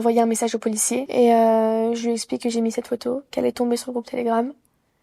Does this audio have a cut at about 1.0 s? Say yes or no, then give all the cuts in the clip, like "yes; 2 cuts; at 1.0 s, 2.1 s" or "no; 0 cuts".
yes; 1 cut; at 1.0 s